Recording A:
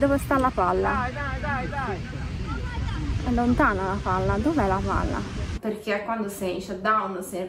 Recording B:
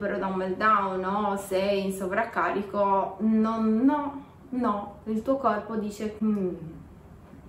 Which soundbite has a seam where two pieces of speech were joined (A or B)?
A